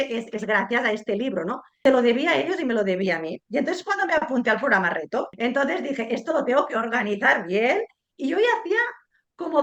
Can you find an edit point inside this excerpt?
yes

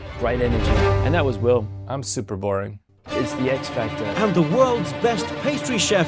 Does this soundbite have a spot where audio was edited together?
yes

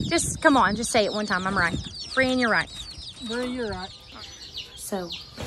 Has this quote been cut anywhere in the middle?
yes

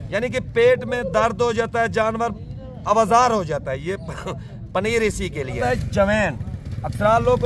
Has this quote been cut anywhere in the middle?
yes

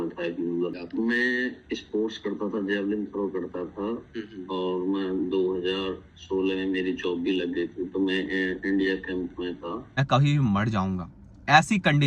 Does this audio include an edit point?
yes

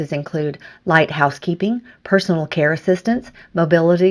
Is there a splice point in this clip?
no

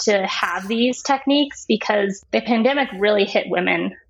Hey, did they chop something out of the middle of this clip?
yes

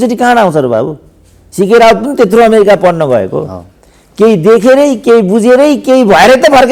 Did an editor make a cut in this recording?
no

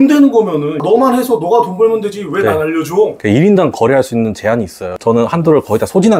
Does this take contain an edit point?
yes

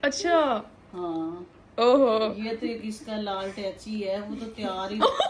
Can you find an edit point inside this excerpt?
no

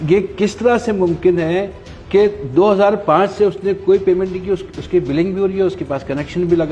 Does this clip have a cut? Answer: no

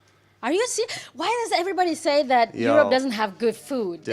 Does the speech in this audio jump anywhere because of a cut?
yes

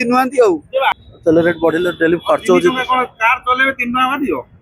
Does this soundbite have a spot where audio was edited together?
yes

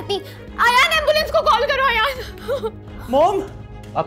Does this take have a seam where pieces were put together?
no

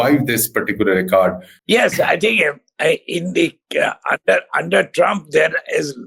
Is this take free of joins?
no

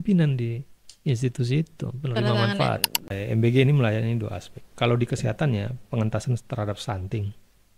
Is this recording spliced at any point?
yes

